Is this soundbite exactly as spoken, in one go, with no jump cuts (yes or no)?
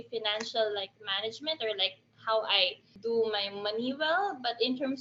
yes